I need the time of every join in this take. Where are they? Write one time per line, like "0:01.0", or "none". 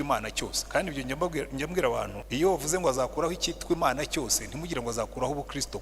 0:02.2